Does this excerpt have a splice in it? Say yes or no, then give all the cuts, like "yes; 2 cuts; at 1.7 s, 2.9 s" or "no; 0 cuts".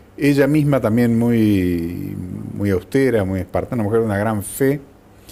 no; 0 cuts